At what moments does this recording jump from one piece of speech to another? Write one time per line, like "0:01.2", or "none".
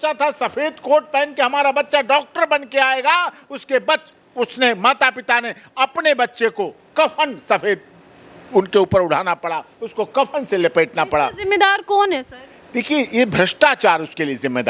none